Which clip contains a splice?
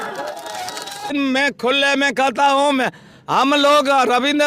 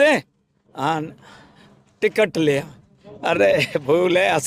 first; 1 cut; at 1.1 s

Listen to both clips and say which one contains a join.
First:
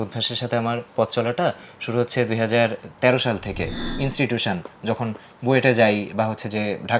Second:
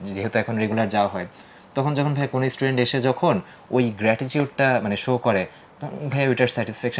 first; 1 cut; at 3.9 s

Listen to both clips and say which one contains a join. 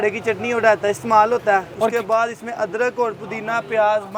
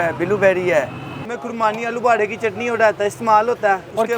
second; 1 cut; at 1.2 s

